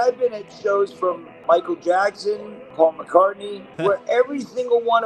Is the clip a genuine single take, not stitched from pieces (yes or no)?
no